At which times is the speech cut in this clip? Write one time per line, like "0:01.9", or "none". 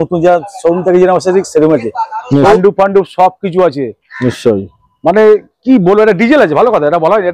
0:02.6